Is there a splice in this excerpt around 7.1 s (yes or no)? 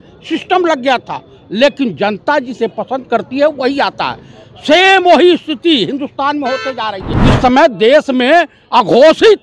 yes